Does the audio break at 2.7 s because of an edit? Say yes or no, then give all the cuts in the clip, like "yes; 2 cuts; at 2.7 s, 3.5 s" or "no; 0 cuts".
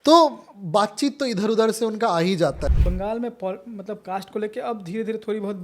yes; 1 cut; at 2.7 s